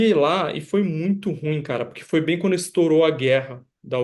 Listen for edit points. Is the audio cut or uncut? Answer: uncut